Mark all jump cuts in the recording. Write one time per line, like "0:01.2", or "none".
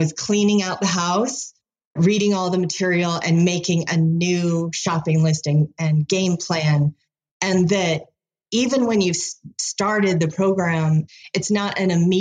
none